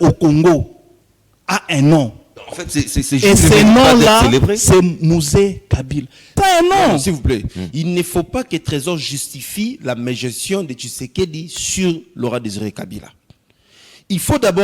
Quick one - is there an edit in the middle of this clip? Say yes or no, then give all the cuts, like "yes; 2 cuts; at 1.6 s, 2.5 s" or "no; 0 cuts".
yes; 1 cut; at 6.3 s